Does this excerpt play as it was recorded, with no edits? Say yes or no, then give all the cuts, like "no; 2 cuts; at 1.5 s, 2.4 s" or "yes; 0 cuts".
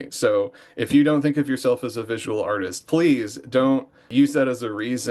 no; 1 cut; at 4.1 s